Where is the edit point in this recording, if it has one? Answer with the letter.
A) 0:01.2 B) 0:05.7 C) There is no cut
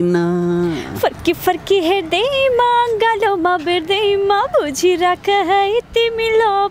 C